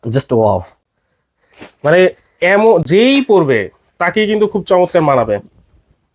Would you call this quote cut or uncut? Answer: uncut